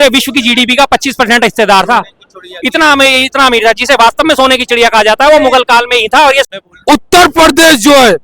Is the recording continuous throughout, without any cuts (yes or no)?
no